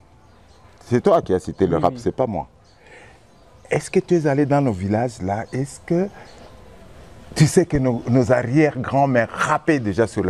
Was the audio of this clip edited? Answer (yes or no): no